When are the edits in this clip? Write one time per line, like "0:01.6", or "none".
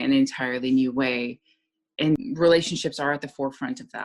0:02.2